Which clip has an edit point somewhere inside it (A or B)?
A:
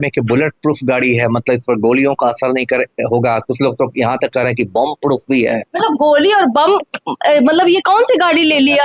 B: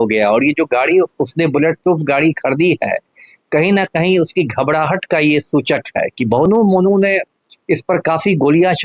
B